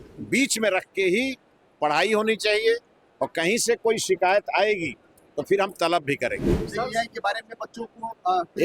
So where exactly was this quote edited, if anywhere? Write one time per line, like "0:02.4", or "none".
0:06.5